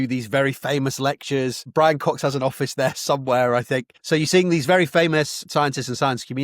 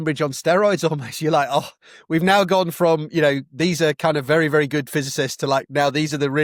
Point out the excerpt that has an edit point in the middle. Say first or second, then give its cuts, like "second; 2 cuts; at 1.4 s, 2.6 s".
first; 3 cuts; at 1.7 s, 3.9 s, 5.4 s